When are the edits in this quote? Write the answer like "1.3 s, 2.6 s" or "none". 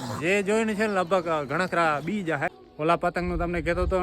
2.6 s